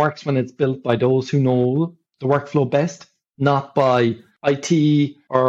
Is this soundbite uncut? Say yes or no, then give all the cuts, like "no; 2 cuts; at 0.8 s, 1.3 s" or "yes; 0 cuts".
yes; 0 cuts